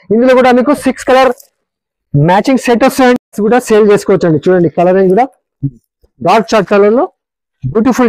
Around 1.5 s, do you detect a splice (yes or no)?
no